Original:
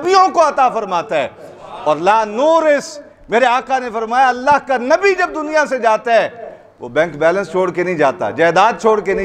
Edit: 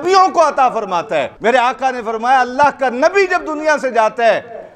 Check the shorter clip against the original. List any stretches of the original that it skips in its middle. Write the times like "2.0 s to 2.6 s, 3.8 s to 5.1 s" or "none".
1.3 s to 3.2 s